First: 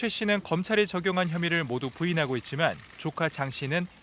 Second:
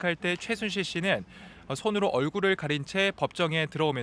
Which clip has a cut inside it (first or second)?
first